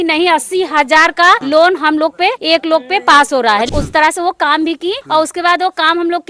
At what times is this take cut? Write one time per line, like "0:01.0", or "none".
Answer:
0:01.4
0:02.4
0:03.7